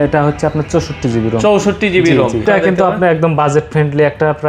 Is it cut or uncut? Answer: cut